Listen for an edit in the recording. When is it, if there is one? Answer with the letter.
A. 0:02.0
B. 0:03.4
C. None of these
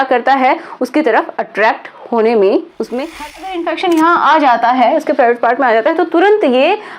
B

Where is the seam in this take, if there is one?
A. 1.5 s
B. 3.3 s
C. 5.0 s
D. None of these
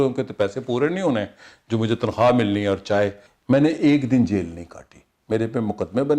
B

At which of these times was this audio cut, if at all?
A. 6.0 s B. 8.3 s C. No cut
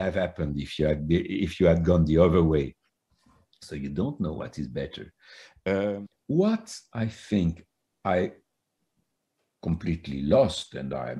A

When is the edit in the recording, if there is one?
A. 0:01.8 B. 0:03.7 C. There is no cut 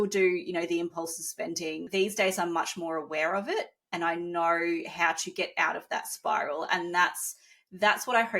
A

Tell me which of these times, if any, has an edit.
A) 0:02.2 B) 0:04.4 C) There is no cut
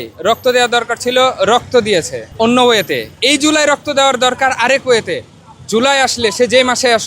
A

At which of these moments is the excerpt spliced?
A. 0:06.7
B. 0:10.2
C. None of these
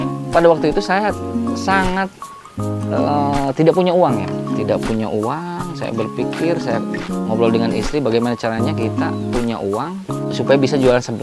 B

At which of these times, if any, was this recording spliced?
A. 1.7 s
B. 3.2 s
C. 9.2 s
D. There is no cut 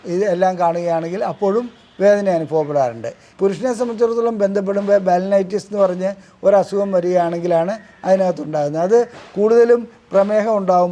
B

